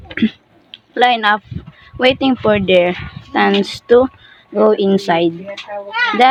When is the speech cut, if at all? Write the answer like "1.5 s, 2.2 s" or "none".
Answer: none